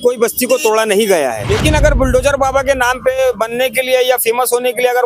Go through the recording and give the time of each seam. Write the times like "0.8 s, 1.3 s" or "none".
1.4 s